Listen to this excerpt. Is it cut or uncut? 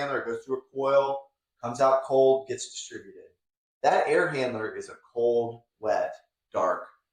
uncut